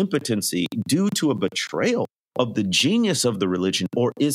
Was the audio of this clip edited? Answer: yes; 1 cut; at 2.2 s

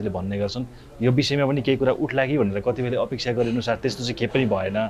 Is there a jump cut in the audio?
no; 0 cuts

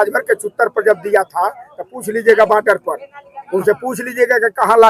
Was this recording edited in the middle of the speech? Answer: no; 0 cuts

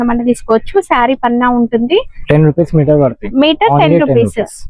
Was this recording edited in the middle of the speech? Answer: yes; 1 cut; at 2.1 s

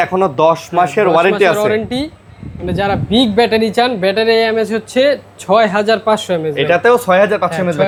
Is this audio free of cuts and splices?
yes; 0 cuts

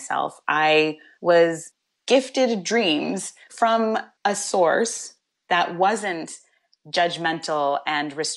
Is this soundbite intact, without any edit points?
no; 1 cut; at 4.1 s

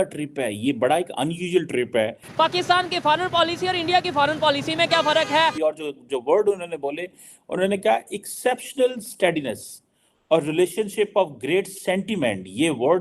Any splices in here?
yes; 2 cuts; at 2.2 s, 5.5 s

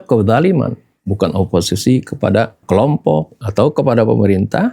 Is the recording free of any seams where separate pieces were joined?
no; 2 cuts; at 2.6 s, 3.4 s

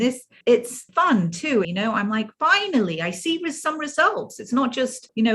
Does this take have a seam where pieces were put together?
yes; 1 cut; at 1.7 s

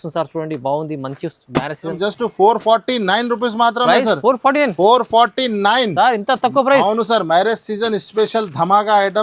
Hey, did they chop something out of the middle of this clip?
yes; 1 cut; at 1.9 s

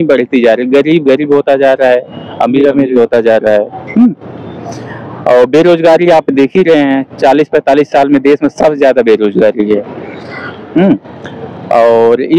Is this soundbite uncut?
yes; 0 cuts

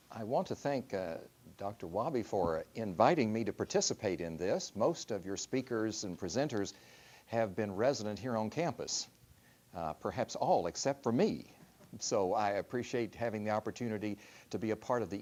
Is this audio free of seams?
yes; 0 cuts

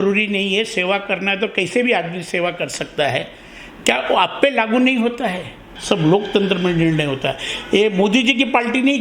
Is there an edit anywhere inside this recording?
yes; 1 cut; at 5.7 s

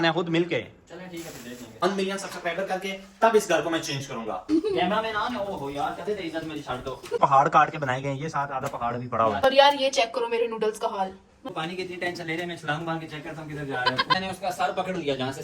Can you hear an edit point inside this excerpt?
yes; 6 cuts; at 1.8 s, 4.5 s, 7.2 s, 9.4 s, 11.5 s, 14.2 s

